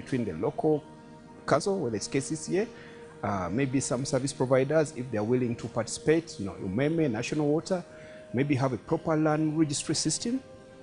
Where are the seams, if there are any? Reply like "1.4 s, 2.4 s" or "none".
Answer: 1.5 s